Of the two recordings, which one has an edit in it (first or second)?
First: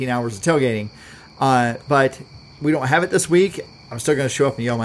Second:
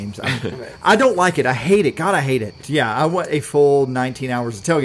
second